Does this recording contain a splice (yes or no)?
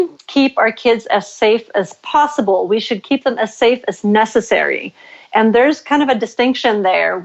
no